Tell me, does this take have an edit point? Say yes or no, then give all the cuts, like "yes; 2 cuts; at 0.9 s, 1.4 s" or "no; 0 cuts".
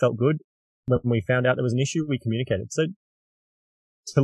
no; 0 cuts